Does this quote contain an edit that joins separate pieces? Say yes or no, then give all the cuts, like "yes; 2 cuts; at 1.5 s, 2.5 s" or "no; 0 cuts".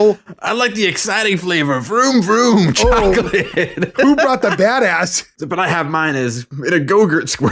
yes; 1 cut; at 5.3 s